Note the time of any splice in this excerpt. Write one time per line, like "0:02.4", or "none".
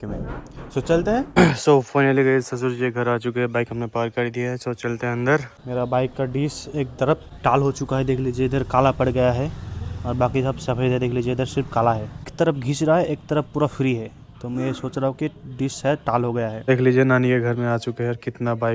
0:01.3
0:05.6
0:07.3
0:12.3
0:16.6